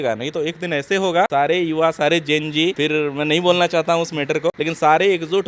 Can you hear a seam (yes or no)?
yes